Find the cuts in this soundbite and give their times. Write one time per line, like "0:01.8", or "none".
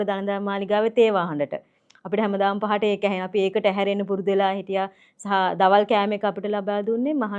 none